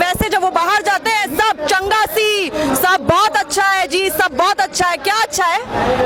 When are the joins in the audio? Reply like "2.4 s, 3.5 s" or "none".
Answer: none